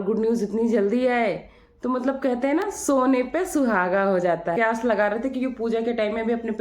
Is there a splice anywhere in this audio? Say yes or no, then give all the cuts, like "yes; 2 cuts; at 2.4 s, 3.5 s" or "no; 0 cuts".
yes; 1 cut; at 4.5 s